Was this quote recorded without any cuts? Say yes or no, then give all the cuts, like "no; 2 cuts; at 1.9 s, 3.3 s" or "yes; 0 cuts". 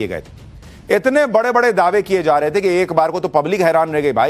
no; 1 cut; at 2.6 s